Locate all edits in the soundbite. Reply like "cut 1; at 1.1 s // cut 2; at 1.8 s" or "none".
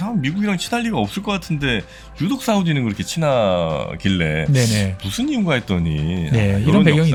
none